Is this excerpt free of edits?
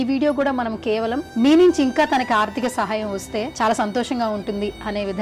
no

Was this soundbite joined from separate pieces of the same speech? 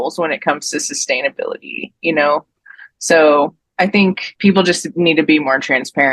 yes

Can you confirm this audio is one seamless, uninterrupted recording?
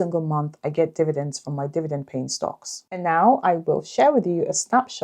no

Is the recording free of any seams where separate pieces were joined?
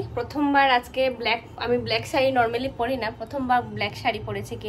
yes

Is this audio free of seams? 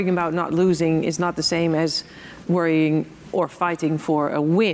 yes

